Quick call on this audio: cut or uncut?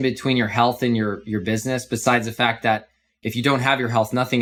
uncut